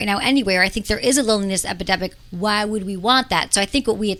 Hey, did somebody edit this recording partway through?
no; 0 cuts

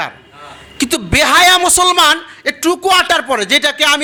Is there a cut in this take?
no; 0 cuts

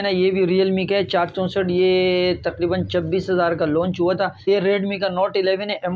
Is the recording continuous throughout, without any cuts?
no; 1 cut; at 4.5 s

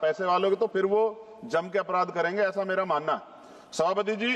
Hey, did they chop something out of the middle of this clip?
no; 0 cuts

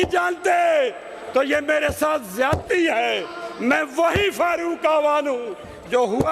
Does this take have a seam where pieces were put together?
no; 0 cuts

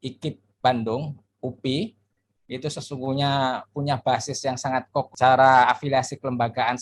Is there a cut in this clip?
yes; 1 cut; at 5.1 s

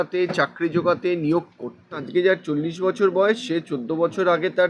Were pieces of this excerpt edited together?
yes; 1 cut; at 2.0 s

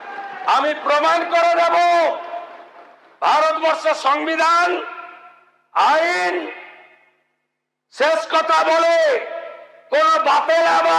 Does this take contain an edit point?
no; 0 cuts

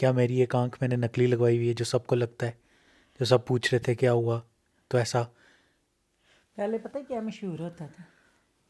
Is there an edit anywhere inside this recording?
no; 0 cuts

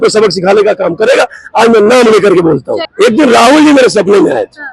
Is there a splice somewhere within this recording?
no; 0 cuts

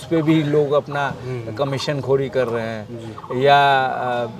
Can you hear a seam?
no; 0 cuts

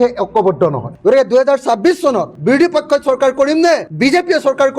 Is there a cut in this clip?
yes; 2 cuts; at 0.9 s, 2.3 s

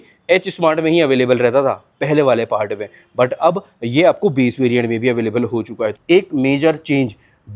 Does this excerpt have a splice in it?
yes; 1 cut; at 6.0 s

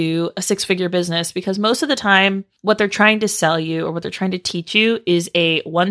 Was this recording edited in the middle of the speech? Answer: yes; 1 cut; at 2.5 s

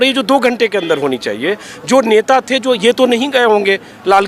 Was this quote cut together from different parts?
no; 0 cuts

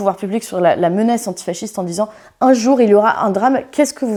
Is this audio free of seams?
yes; 0 cuts

